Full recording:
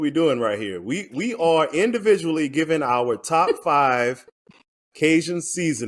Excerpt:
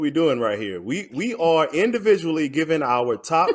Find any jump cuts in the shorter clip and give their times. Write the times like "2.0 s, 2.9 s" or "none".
none